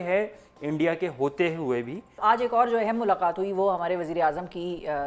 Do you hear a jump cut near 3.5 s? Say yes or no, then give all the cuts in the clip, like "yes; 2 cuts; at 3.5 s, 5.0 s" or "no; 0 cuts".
no; 1 cut; at 2.2 s